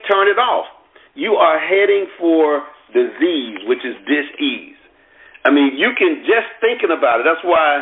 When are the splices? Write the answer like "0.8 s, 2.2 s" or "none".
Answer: none